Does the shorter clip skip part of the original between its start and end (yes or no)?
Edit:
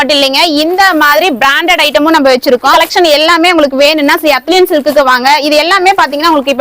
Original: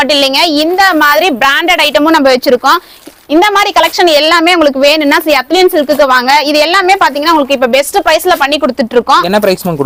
yes